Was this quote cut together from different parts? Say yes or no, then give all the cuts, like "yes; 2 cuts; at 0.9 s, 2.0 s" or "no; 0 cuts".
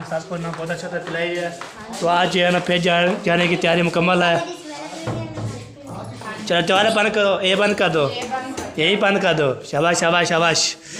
no; 0 cuts